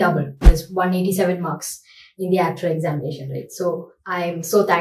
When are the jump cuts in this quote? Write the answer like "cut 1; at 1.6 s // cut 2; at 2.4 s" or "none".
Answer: none